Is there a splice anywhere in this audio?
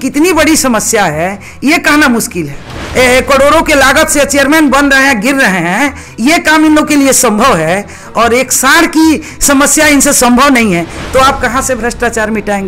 yes; 2 cuts; at 2.8 s, 11.0 s

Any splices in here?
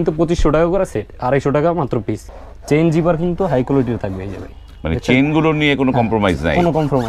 yes; 1 cut; at 2.2 s

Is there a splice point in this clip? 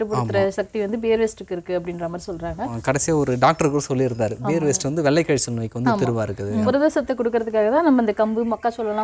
yes; 2 cuts; at 2.8 s, 6.7 s

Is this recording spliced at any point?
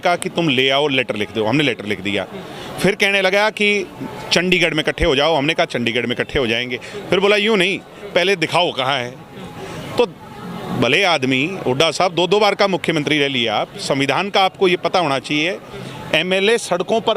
no; 0 cuts

